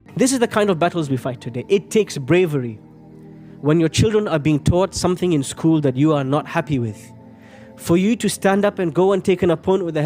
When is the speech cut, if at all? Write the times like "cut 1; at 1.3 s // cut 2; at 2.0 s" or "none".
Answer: none